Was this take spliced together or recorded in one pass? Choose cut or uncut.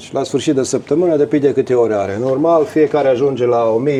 uncut